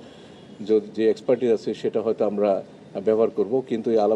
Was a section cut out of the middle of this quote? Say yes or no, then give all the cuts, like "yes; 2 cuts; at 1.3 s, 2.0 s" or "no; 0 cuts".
no; 0 cuts